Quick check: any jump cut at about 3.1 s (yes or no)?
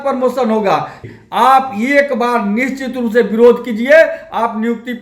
no